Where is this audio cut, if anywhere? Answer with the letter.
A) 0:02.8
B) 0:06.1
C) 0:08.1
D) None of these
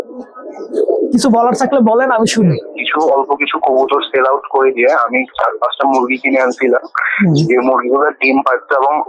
A